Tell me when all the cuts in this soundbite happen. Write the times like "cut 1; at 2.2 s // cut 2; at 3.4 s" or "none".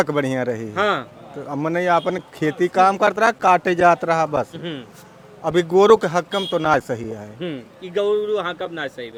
none